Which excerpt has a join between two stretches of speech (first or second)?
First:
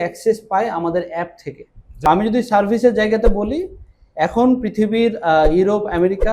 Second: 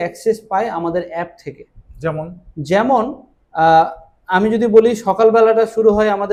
first